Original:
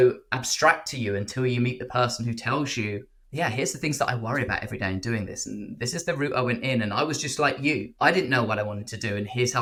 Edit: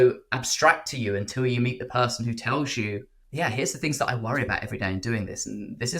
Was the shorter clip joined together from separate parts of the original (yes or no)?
no